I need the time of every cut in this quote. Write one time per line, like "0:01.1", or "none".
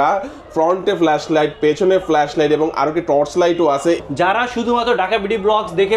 0:04.0

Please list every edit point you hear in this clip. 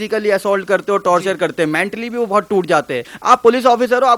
0:03.1

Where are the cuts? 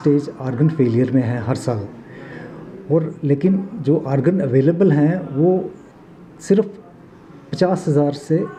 none

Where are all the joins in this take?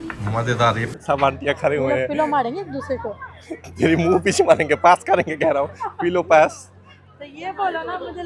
0:00.9
0:05.0

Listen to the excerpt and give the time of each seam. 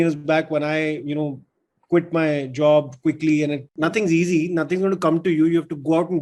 0:03.7

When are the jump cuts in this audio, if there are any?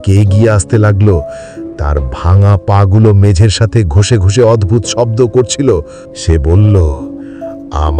0:06.0

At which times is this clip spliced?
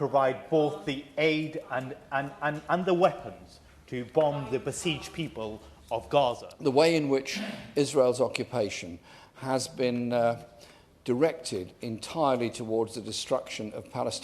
0:06.5

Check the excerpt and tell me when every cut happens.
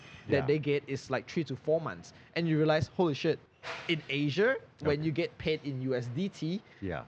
0:03.5

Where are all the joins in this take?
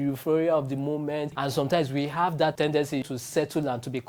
0:01.3

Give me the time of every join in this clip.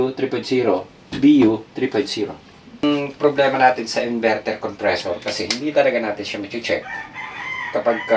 0:02.8

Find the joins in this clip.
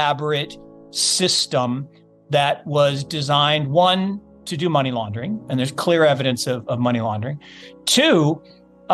none

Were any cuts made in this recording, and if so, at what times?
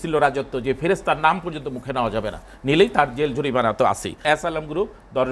0:04.2

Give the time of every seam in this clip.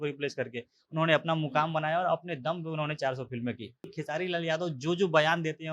0:04.0

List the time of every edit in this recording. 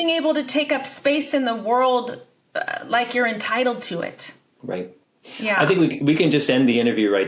none

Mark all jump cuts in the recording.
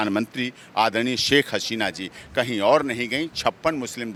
none

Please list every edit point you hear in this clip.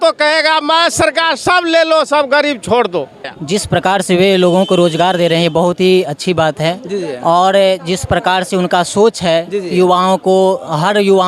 0:03.3

